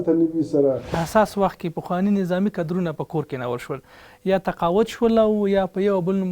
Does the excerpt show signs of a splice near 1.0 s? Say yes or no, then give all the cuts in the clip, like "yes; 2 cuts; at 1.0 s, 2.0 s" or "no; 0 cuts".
yes; 1 cut; at 1.0 s